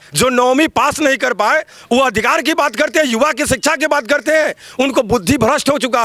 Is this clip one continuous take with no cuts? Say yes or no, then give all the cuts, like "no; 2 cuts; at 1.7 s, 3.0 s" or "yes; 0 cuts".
yes; 0 cuts